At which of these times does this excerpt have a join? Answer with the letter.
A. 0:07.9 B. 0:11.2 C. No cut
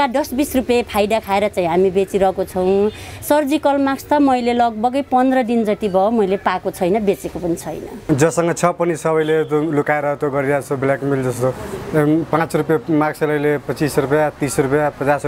A